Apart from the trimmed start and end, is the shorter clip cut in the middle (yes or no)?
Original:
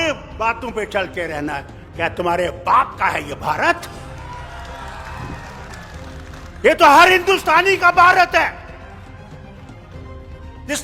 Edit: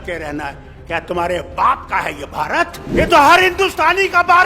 yes